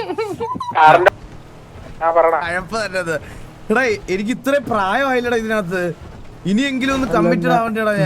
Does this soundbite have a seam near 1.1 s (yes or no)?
yes